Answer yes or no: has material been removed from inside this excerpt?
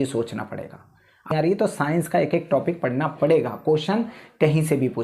yes